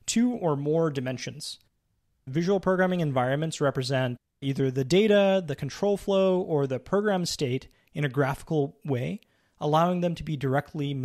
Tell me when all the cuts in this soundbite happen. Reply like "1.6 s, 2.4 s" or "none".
4.3 s